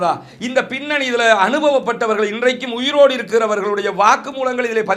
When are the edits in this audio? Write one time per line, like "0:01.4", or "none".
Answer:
none